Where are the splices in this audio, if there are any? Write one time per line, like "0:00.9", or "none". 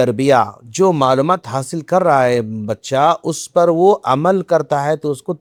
none